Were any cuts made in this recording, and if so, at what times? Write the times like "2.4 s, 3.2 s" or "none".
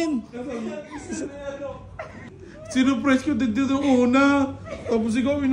2.2 s